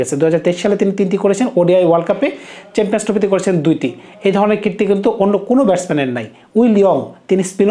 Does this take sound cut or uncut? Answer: uncut